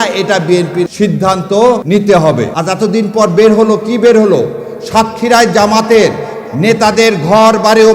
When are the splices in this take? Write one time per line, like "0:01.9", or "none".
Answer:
0:00.9
0:01.8
0:02.5